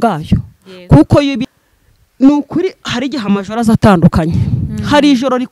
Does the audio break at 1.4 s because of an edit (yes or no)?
yes